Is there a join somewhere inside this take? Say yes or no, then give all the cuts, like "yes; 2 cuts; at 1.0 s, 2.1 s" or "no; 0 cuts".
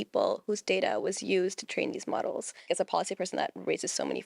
yes; 1 cut; at 2.7 s